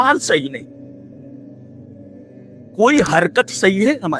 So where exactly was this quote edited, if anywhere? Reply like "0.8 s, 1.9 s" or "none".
1.2 s, 2.8 s